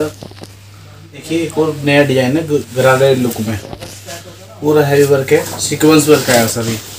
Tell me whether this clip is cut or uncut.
cut